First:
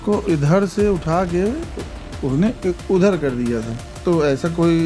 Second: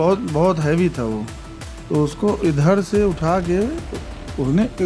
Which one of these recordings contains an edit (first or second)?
first